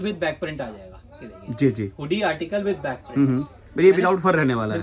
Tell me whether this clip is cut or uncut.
uncut